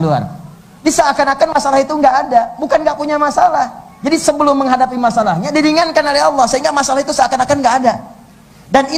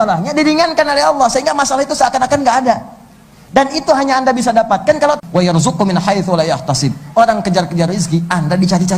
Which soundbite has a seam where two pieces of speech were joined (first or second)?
second